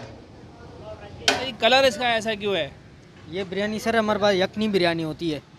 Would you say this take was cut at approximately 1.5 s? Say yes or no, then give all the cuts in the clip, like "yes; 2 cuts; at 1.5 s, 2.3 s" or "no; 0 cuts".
yes; 2 cuts; at 1.5 s, 3.2 s